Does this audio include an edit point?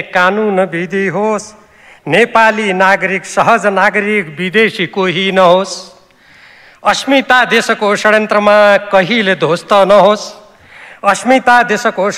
no; 0 cuts

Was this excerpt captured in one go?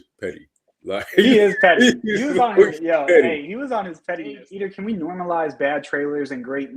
no; 1 cut; at 4.5 s

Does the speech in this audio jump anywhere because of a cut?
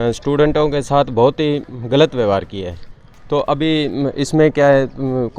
no; 0 cuts

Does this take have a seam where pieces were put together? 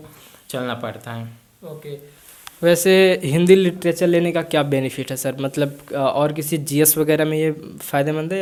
no; 0 cuts

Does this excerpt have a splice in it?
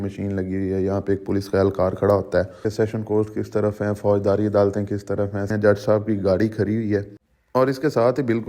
yes; 2 cuts; at 2.7 s, 5.5 s

